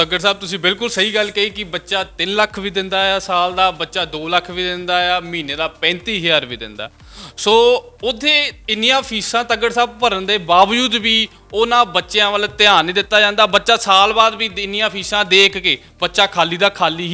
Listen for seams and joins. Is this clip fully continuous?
yes; 0 cuts

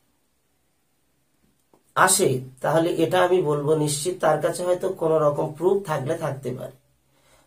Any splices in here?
no; 0 cuts

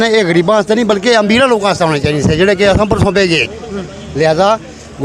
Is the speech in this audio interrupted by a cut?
no; 0 cuts

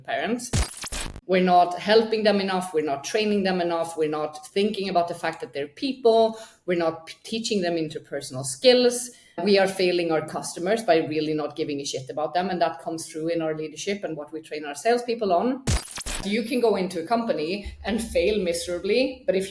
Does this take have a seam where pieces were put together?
yes; 3 cuts; at 0.9 s, 9.4 s, 16.2 s

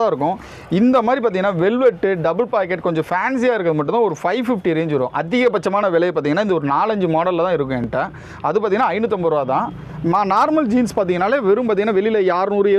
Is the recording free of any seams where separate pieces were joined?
yes; 0 cuts

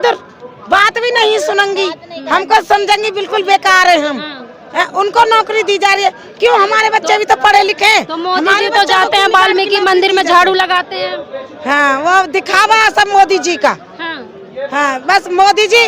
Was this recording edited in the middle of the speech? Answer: no; 0 cuts

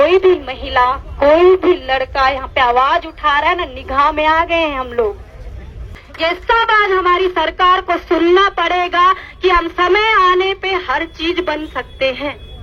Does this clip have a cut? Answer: yes; 1 cut; at 6.0 s

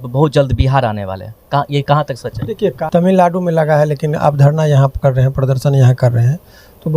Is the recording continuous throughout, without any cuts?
no; 1 cut; at 2.8 s

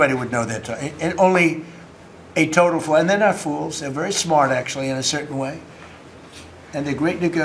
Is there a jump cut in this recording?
no; 0 cuts

